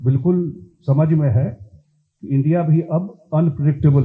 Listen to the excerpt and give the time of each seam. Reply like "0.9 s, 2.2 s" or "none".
none